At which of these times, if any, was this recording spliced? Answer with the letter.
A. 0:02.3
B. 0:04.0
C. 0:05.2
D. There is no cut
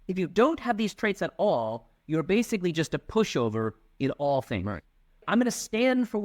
C